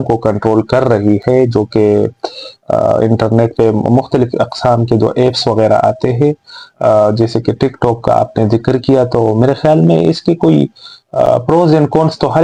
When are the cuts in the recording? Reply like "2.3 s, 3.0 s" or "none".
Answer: none